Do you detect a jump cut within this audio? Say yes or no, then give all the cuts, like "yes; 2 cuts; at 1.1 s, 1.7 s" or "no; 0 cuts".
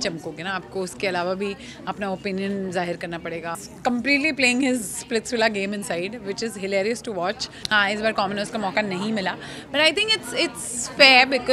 yes; 2 cuts; at 3.5 s, 7.5 s